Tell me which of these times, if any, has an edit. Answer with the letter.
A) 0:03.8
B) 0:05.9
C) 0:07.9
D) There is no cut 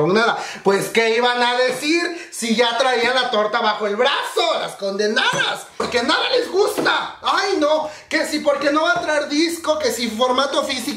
B